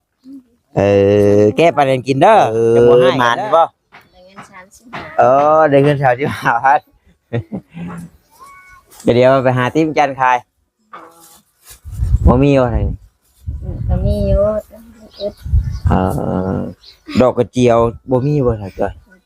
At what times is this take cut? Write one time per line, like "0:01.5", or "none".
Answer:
0:02.6